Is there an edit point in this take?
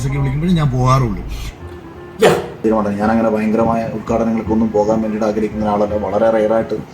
yes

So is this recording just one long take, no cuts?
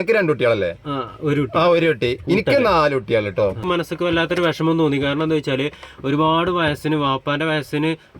no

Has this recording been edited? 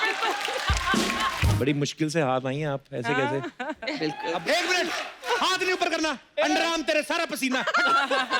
yes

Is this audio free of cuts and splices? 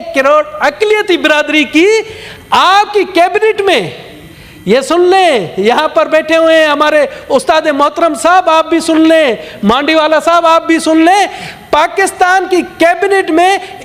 yes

